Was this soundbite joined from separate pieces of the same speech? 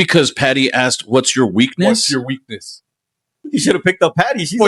yes; 1 cut; at 3.3 s

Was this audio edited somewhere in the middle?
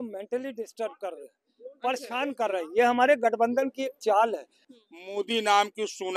yes; 1 cut; at 4.7 s

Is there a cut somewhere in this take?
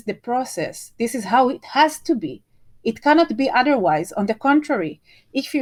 no; 0 cuts

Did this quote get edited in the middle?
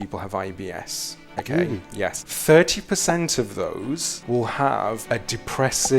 yes; 3 cuts; at 2.3 s, 4.1 s, 5.0 s

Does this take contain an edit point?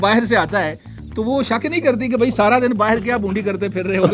no; 0 cuts

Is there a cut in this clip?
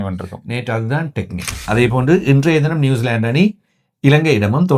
yes; 1 cut; at 1.5 s

